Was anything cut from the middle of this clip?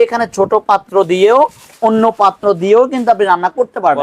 no; 0 cuts

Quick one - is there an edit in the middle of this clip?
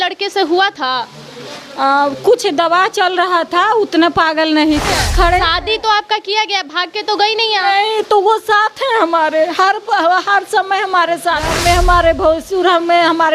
yes; 2 cuts; at 4.9 s, 11.5 s

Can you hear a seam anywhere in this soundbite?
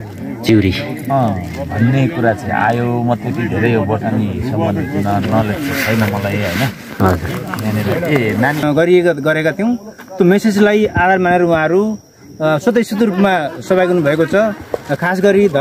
yes; 1 cut; at 8.6 s

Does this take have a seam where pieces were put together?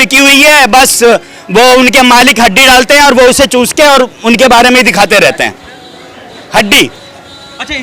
no; 0 cuts

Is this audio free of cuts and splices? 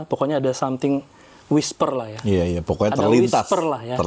yes; 0 cuts

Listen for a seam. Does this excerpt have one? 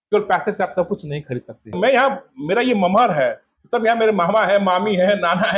yes; 1 cut; at 1.8 s

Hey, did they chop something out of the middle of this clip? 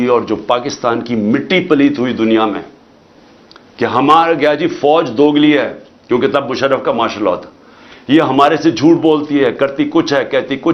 no; 0 cuts

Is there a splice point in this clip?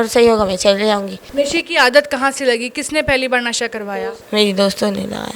yes; 2 cuts; at 1.2 s, 4.2 s

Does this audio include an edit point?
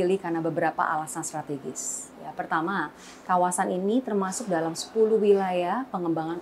no; 0 cuts

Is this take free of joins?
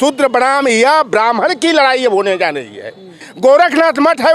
no; 1 cut; at 3.2 s

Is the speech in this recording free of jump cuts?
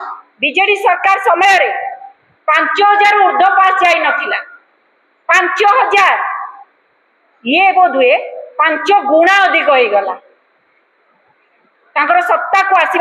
yes; 0 cuts

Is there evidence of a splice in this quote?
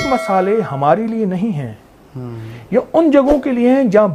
no; 0 cuts

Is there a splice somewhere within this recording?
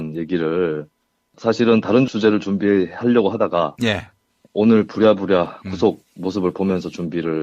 no; 0 cuts

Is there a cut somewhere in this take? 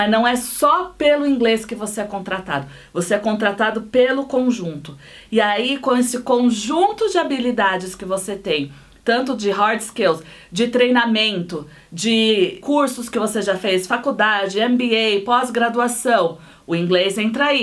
yes; 1 cut; at 12.6 s

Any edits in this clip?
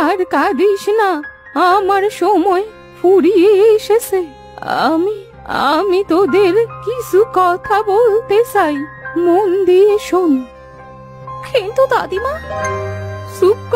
no; 0 cuts

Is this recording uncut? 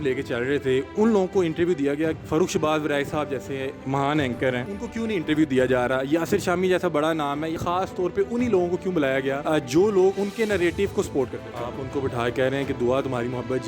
no; 7 cuts; at 2.2 s, 3.8 s, 4.7 s, 7.6 s, 9.4 s, 10.2 s, 11.5 s

